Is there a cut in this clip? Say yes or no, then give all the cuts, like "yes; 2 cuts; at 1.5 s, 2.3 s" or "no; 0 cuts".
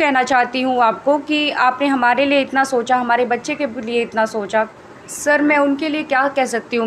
yes; 1 cut; at 5.3 s